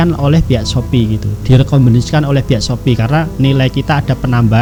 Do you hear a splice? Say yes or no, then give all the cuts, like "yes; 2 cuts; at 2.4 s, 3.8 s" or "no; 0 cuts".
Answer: no; 0 cuts